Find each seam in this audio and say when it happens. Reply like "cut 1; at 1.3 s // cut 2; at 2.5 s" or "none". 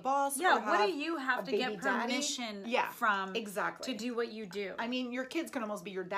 none